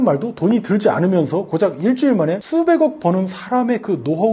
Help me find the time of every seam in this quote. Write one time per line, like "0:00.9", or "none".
none